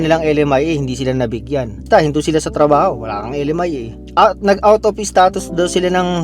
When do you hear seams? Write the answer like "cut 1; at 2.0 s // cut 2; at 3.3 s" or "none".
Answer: cut 1; at 1.8 s